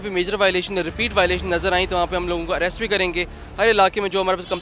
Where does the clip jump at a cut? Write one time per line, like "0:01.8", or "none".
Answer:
0:03.4